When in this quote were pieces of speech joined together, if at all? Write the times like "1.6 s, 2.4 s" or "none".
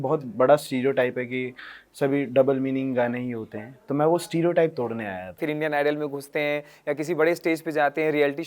5.4 s